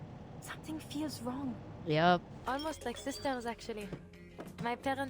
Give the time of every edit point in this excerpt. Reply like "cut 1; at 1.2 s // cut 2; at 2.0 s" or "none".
cut 1; at 2.3 s